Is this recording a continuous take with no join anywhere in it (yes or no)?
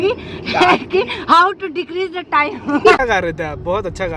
no